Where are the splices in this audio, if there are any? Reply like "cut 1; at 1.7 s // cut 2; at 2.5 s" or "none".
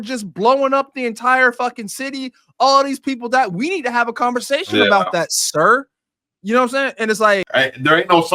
cut 1; at 7.5 s